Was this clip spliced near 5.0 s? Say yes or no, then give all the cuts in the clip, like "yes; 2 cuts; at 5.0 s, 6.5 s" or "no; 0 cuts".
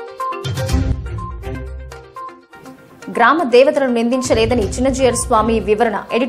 no; 2 cuts; at 1.0 s, 2.5 s